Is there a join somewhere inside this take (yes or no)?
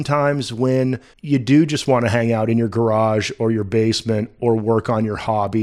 yes